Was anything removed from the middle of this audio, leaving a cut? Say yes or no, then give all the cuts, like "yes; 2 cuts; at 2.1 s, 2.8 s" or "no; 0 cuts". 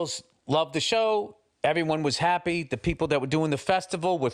no; 0 cuts